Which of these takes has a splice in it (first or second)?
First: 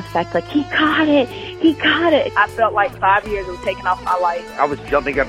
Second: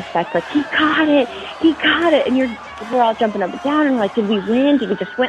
first